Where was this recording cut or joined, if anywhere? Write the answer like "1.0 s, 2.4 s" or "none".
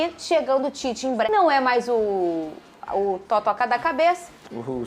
1.3 s